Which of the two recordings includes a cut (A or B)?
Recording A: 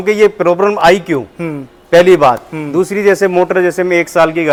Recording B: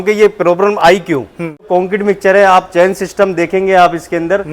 B